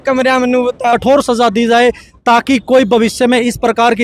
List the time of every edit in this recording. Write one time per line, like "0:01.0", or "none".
0:00.9